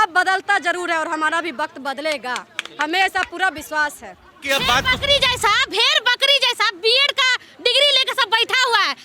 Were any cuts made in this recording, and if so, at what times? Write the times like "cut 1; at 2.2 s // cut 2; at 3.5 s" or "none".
cut 1; at 4.4 s